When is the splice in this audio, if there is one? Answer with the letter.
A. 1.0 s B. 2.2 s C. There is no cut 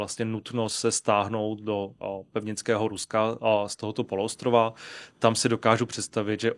C